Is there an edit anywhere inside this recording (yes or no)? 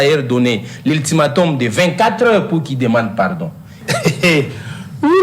yes